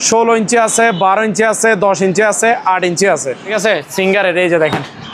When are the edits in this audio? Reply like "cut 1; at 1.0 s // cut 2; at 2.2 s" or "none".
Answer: cut 1; at 3.5 s